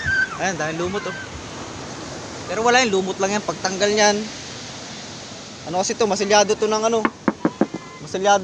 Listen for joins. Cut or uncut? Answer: uncut